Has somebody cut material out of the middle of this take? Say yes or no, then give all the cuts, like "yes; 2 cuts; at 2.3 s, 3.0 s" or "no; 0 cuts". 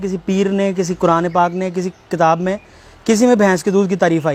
no; 0 cuts